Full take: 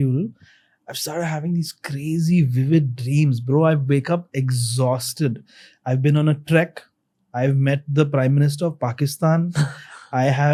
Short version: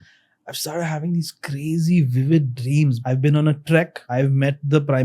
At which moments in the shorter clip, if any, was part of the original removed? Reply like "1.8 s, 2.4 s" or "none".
3.0 s, 4.0 s